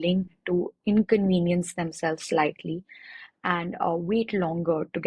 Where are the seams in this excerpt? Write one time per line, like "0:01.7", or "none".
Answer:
none